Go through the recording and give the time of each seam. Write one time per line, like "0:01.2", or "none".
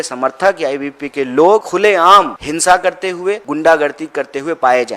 0:02.0
0:03.5